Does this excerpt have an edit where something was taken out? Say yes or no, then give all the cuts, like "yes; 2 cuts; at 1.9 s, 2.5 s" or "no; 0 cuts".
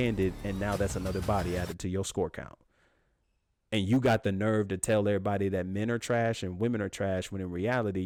no; 0 cuts